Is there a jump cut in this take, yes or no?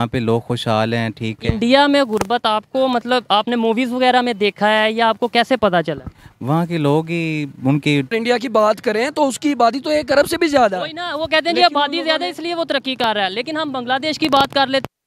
yes